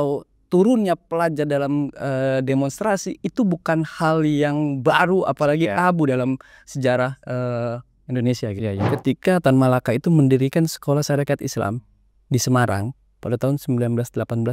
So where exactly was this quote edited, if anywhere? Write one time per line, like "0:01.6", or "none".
0:08.8